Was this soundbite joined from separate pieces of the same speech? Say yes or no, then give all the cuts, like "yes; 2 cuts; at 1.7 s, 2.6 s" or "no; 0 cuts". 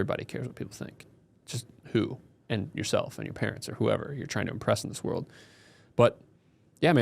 no; 0 cuts